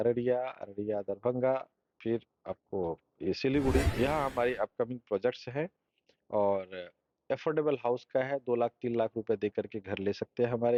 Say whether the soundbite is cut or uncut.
uncut